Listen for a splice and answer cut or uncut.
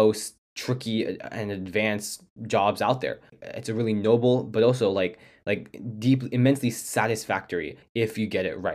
cut